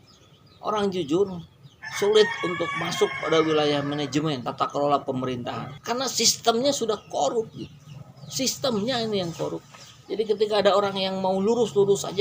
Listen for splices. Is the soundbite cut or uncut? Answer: uncut